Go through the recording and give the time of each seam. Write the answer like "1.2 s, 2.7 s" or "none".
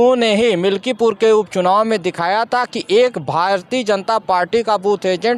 none